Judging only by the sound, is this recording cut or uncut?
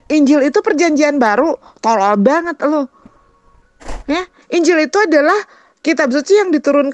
uncut